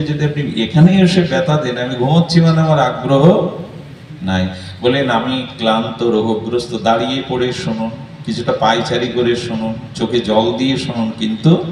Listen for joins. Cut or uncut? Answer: uncut